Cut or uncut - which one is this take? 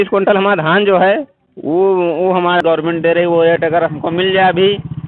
cut